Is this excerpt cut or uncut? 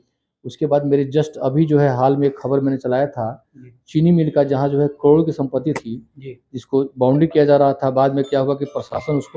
uncut